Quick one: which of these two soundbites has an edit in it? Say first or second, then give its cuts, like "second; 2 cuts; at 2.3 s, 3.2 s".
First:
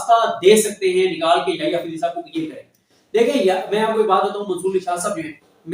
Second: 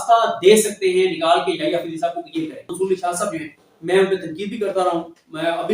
second; 1 cut; at 2.7 s